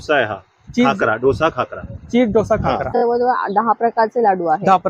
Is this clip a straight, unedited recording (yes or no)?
no